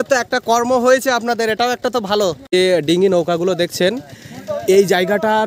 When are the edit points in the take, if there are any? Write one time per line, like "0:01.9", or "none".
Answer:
0:02.5